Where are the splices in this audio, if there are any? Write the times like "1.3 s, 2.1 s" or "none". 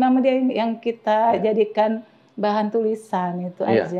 none

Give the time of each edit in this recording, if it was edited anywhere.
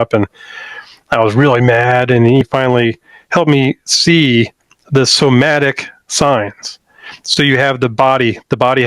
2.4 s

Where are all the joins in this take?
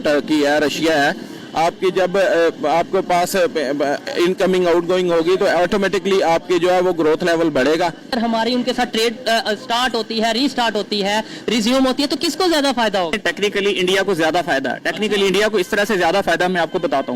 8.1 s, 13.2 s

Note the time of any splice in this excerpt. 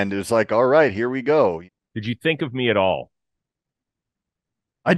1.6 s

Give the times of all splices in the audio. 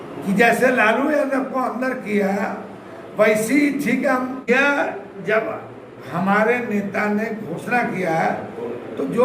4.5 s

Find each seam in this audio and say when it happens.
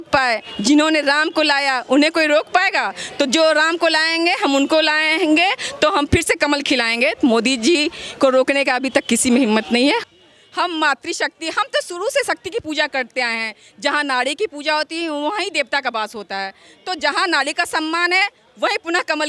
10.0 s

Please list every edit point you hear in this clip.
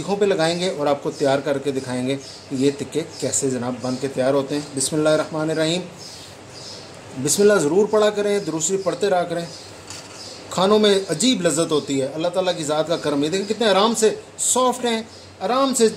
none

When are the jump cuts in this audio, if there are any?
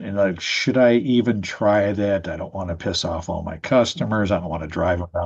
none

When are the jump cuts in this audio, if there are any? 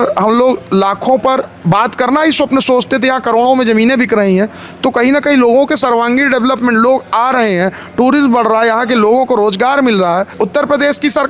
10.3 s

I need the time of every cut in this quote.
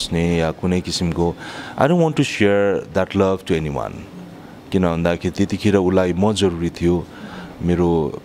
none

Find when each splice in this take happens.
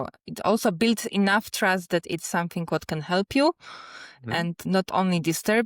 4.6 s

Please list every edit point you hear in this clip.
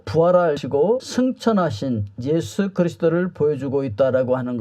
none

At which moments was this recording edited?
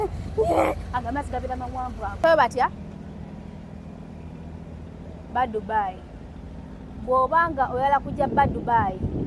2.2 s

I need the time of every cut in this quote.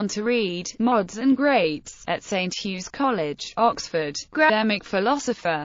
none

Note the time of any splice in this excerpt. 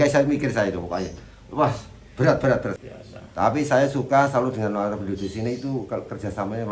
2.8 s

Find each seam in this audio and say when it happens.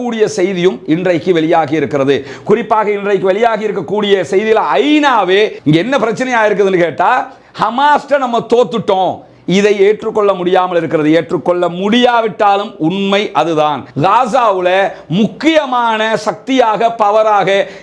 5.6 s, 13.9 s

